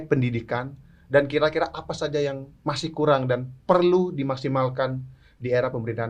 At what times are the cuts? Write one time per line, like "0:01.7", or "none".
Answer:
none